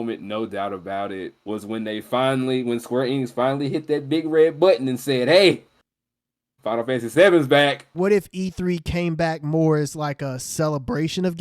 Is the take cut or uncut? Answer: cut